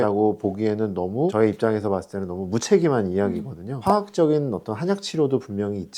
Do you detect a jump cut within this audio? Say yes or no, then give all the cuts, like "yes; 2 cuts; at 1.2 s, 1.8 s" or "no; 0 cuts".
yes; 1 cut; at 3.8 s